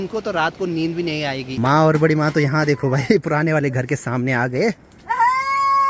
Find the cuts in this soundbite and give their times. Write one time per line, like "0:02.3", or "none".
0:01.5